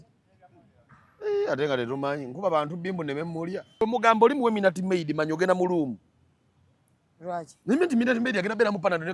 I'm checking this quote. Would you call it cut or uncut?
cut